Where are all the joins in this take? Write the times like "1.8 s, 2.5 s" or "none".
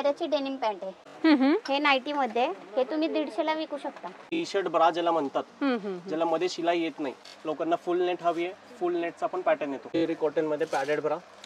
1.1 s, 4.4 s, 7.3 s, 10.0 s